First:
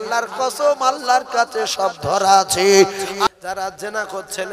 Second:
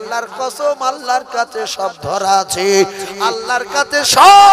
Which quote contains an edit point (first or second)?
first